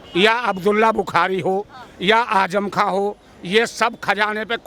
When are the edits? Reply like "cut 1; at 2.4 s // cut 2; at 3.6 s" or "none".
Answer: none